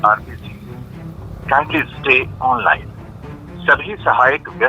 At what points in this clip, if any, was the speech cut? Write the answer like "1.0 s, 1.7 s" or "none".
none